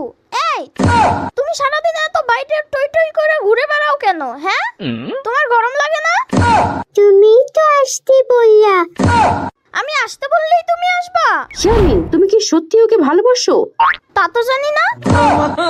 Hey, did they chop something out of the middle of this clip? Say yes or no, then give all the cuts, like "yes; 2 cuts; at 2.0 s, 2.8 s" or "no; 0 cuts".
yes; 1 cut; at 11.5 s